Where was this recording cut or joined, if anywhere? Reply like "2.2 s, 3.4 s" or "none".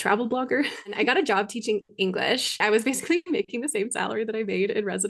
0.9 s, 2.6 s